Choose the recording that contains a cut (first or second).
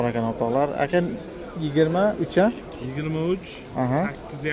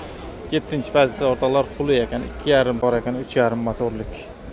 second